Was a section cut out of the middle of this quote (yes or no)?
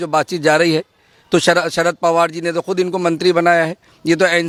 no